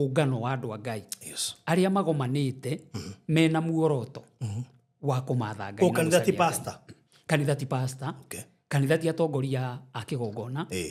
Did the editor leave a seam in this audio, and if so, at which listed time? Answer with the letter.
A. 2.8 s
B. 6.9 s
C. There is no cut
C